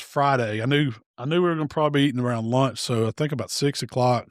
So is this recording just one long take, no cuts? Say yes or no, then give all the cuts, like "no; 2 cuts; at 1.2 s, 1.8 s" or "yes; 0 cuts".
yes; 0 cuts